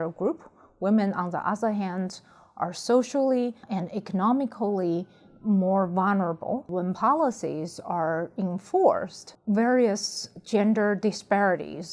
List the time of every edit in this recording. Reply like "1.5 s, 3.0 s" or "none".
3.6 s, 6.7 s